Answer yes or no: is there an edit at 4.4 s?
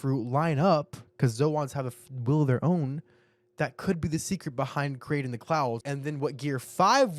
no